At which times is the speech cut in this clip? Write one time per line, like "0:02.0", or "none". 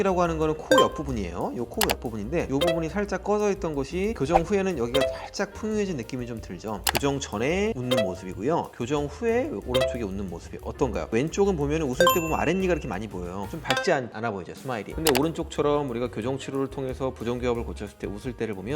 0:06.9